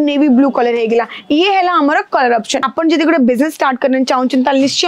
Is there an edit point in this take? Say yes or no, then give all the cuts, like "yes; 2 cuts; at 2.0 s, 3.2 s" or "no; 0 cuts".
yes; 1 cut; at 2.5 s